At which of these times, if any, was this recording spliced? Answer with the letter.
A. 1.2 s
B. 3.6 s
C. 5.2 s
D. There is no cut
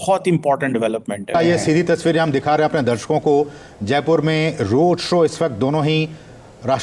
A